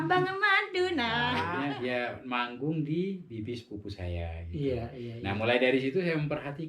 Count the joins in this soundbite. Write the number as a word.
one